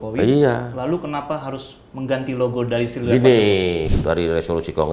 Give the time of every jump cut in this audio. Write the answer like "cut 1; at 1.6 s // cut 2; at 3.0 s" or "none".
cut 1; at 3.9 s